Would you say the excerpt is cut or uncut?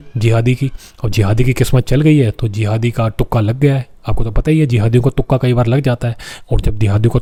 uncut